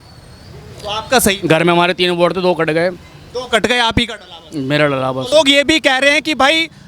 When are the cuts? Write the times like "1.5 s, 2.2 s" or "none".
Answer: 5.3 s